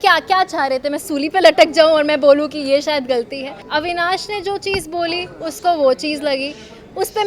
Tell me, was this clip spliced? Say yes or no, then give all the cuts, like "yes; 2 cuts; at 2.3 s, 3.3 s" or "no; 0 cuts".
yes; 1 cut; at 3.6 s